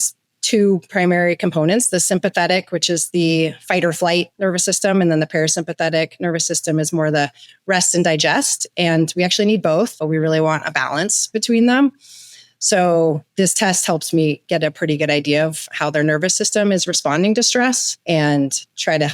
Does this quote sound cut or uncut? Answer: cut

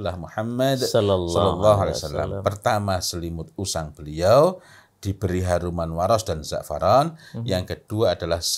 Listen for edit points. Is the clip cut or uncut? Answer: uncut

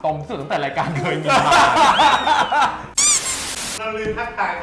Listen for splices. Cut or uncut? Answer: uncut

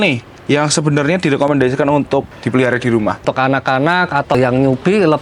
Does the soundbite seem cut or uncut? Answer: cut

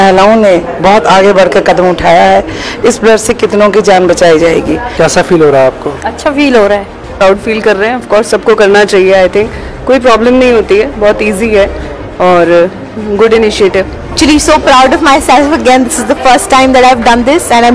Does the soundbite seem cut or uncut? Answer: cut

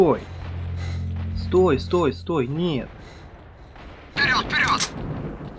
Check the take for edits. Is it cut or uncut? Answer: cut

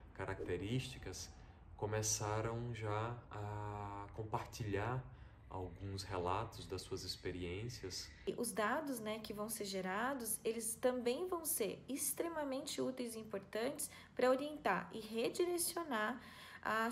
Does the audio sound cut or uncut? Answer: cut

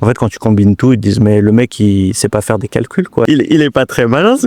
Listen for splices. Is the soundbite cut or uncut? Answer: cut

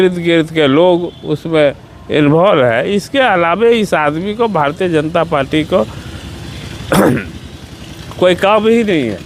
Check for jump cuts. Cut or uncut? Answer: uncut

